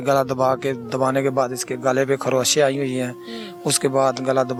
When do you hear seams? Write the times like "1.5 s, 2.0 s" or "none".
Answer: none